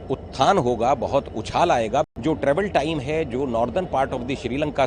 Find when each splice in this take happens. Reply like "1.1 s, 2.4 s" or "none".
2.1 s